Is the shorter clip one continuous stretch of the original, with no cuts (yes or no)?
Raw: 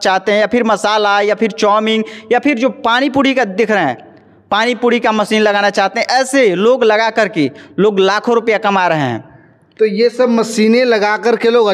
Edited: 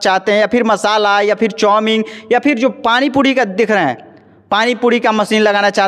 yes